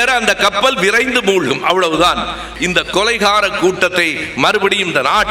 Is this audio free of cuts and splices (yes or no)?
no